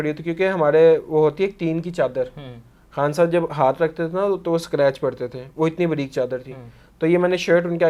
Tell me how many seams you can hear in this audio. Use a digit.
0